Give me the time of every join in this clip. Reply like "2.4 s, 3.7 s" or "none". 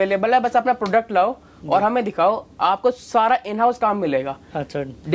none